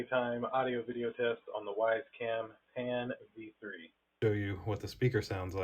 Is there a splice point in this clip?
yes; 1 cut; at 4.1 s

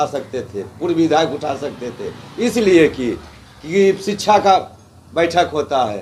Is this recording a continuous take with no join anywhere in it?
yes; 0 cuts

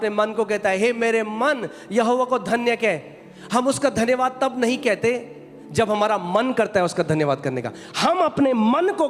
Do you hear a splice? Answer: no; 0 cuts

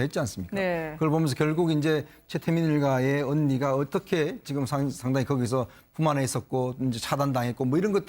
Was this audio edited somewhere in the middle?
yes; 1 cut; at 7.0 s

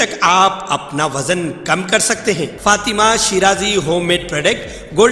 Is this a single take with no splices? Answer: no; 1 cut; at 2.5 s

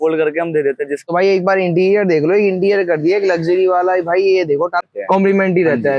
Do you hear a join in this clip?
yes; 2 cuts; at 1.0 s, 4.9 s

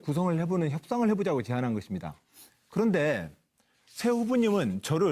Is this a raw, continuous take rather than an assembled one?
no; 1 cut; at 1.8 s

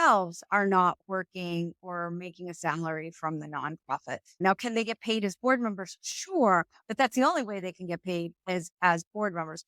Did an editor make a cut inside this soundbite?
yes; 1 cut; at 4.4 s

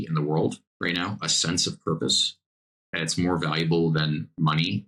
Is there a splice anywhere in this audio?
no; 0 cuts

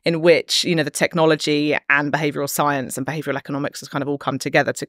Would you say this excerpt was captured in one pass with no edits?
yes; 0 cuts

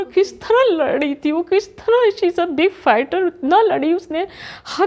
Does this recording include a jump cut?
no; 0 cuts

